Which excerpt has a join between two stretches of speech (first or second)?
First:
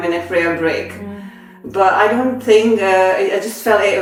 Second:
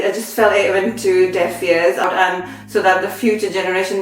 second